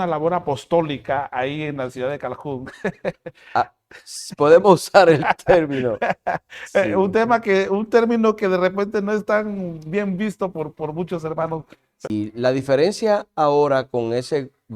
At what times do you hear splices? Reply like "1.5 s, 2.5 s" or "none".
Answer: 12.1 s